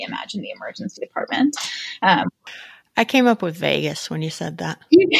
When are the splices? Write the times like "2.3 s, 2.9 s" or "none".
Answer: 2.5 s